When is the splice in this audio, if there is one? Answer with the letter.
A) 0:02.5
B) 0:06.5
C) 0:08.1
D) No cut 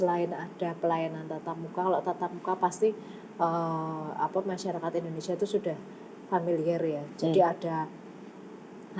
D